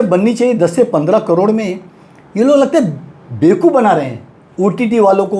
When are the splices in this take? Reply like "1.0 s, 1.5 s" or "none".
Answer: none